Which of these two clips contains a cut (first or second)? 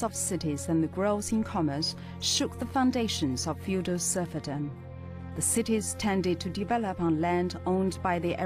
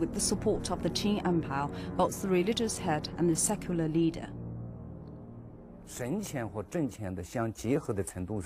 second